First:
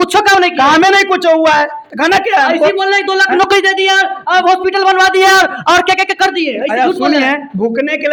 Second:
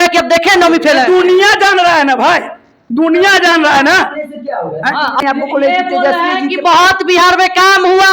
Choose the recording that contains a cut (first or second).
second